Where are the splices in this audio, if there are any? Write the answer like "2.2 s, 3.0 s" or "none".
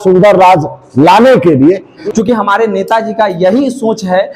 1.9 s